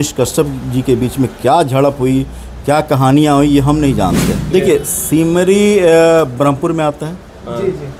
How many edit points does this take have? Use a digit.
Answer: 1